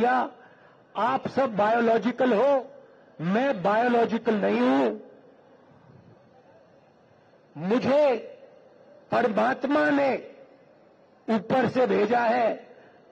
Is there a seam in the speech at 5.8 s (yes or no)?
no